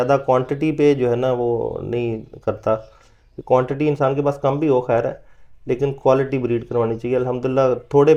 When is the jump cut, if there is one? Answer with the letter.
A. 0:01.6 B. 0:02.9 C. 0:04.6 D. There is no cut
D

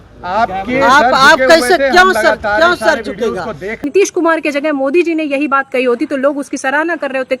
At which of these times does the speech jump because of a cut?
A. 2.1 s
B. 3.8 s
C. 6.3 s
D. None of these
B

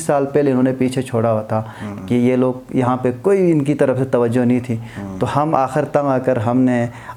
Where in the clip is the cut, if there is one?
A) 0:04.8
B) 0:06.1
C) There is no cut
C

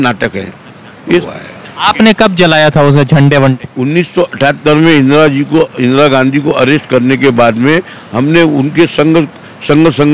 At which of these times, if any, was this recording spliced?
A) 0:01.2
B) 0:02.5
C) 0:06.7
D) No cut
A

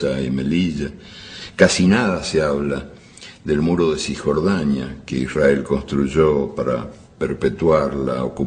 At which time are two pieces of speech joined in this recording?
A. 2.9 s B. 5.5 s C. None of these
B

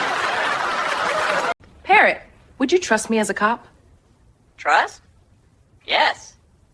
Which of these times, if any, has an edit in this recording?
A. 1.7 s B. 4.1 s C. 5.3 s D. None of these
A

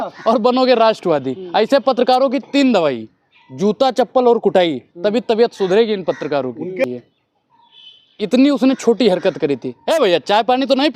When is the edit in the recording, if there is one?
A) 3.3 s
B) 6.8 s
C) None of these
B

